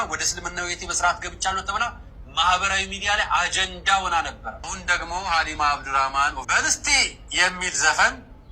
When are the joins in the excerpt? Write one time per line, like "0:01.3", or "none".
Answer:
0:04.7
0:06.4